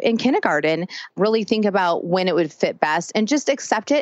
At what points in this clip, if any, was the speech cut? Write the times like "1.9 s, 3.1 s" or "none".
1.1 s